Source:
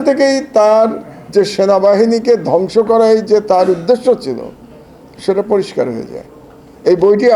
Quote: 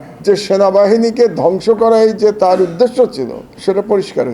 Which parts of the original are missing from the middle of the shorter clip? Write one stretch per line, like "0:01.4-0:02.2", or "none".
0:04.5-0:05.0